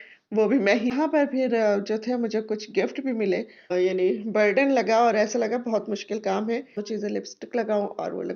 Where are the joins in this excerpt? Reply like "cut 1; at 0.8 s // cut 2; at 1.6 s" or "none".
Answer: cut 1; at 0.9 s // cut 2; at 3.7 s // cut 3; at 6.8 s